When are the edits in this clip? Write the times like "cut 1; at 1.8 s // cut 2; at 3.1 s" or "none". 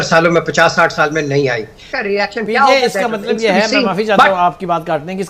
cut 1; at 1.9 s

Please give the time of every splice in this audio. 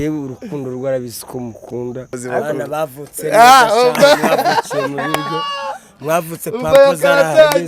cut 1; at 2.1 s

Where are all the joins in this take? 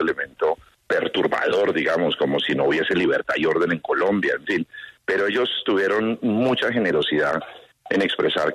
none

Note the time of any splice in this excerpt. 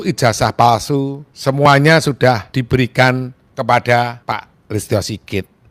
cut 1; at 1.2 s // cut 2; at 2.5 s // cut 3; at 3.4 s // cut 4; at 4.2 s

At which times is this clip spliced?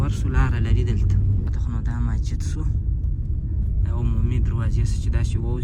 none

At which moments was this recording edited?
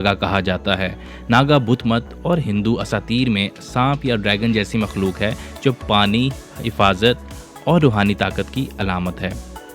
none

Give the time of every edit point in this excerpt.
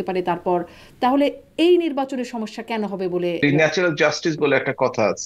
cut 1; at 3.4 s

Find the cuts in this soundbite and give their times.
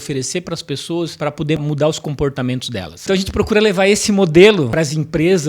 cut 1; at 1.6 s // cut 2; at 3.0 s // cut 3; at 4.7 s

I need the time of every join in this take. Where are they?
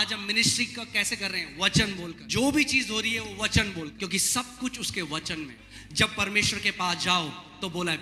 cut 1; at 2.2 s // cut 2; at 3.9 s // cut 3; at 5.6 s

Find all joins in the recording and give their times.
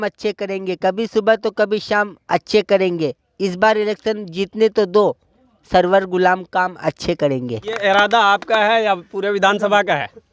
cut 1; at 7.8 s

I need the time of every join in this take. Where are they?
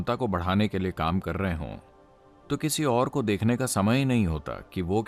none

